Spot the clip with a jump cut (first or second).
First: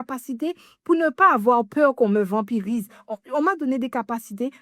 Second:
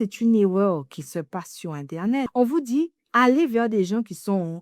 second